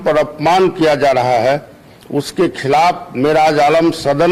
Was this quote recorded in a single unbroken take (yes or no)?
yes